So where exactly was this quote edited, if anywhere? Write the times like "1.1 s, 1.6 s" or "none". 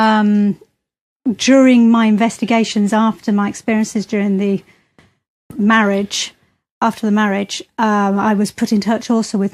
5.3 s